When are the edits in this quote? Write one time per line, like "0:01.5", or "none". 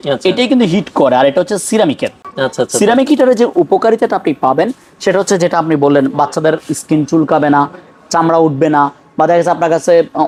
none